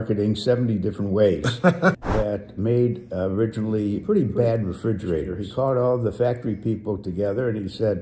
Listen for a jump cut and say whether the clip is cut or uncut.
cut